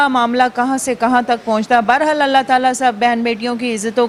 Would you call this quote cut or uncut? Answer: uncut